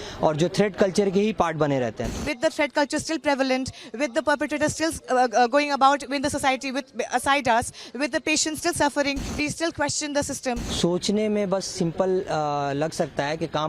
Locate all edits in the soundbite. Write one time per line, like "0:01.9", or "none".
0:02.2
0:09.3
0:10.7